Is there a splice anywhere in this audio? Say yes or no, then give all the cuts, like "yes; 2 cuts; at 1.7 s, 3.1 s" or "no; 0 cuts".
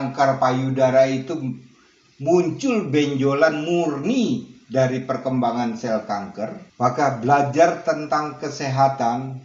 yes; 1 cut; at 6.6 s